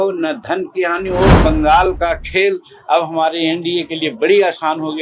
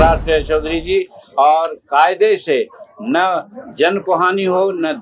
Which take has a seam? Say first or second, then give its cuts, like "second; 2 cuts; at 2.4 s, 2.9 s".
first; 1 cut; at 1.4 s